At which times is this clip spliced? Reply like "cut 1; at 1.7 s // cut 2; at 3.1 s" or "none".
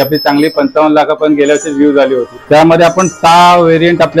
cut 1; at 2.3 s